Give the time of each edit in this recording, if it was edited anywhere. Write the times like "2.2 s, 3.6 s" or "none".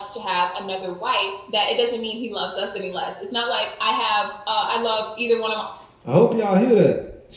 none